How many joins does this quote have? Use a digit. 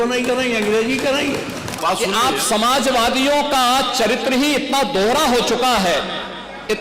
1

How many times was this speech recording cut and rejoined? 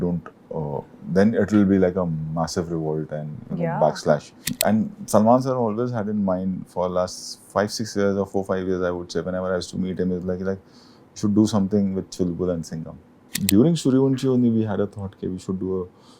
2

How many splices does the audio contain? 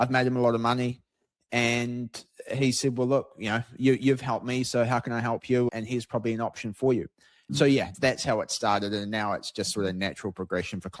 2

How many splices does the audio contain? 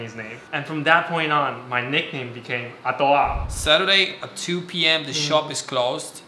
1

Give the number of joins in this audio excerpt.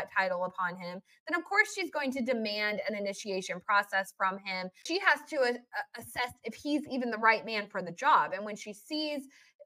1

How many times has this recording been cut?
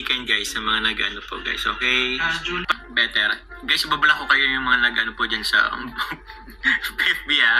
1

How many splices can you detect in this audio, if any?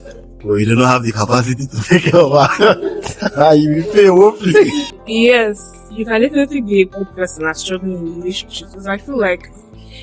1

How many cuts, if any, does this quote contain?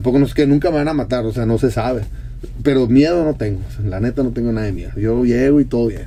0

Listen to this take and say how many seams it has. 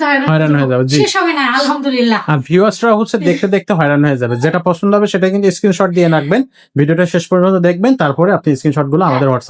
0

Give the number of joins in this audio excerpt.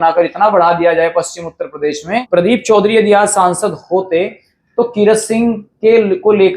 1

